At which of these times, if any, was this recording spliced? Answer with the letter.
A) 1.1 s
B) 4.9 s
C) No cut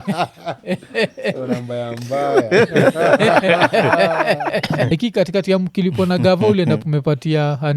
B